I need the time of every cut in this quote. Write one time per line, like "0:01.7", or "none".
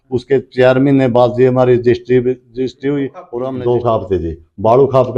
0:03.2